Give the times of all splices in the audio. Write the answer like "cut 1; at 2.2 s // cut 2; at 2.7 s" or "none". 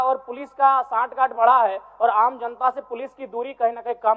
none